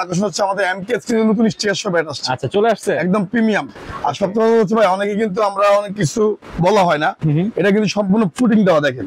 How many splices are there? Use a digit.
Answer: 0